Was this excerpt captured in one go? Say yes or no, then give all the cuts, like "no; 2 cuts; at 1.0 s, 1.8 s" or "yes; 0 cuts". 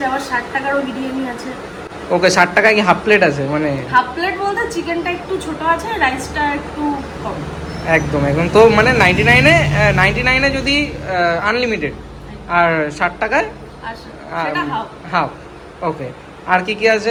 yes; 0 cuts